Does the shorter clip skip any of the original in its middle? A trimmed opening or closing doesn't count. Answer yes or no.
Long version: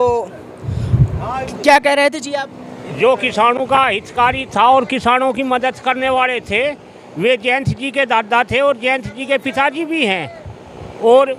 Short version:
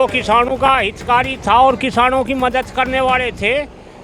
no